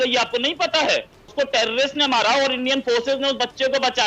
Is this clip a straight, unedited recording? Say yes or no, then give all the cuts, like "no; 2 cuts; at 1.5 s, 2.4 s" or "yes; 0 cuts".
no; 1 cut; at 1.2 s